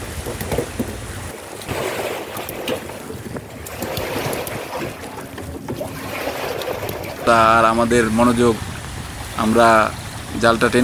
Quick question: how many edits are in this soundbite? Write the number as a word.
one